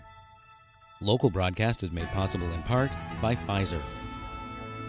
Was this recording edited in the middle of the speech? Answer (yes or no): yes